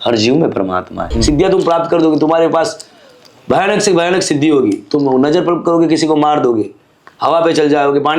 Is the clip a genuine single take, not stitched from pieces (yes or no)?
no